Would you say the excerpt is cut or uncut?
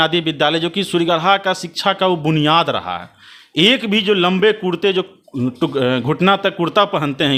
uncut